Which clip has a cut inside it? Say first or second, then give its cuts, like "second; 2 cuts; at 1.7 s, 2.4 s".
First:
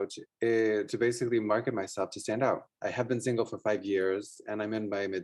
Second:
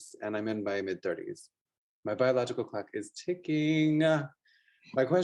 first; 1 cut; at 2.8 s